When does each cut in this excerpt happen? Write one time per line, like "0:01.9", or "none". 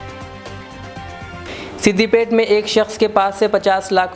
0:01.4